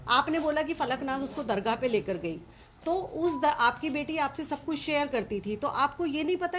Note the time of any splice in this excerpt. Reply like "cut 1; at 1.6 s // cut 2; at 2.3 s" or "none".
none

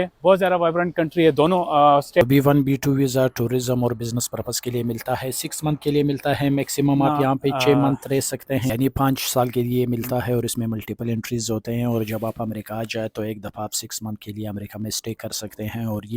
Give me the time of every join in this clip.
cut 1; at 2.2 s // cut 2; at 8.7 s

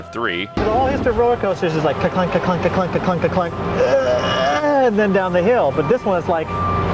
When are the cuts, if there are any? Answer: none

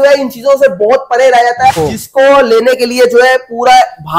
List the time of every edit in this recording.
cut 1; at 1.8 s

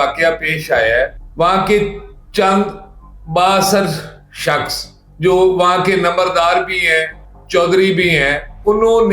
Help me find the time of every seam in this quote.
none

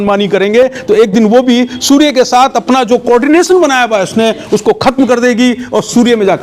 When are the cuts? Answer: none

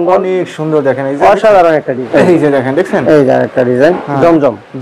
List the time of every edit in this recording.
cut 1; at 2.0 s

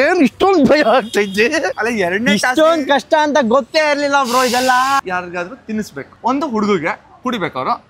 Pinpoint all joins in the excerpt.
cut 1; at 1.8 s // cut 2; at 5.0 s

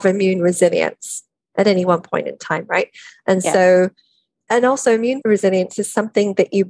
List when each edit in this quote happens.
cut 1; at 4.4 s // cut 2; at 5.2 s

